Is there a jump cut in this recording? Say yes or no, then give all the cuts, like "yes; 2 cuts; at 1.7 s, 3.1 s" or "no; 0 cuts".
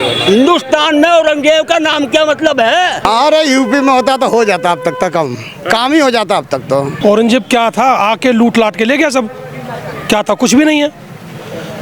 yes; 2 cuts; at 3.0 s, 6.9 s